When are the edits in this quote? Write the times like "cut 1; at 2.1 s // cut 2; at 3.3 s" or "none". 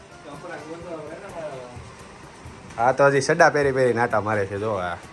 none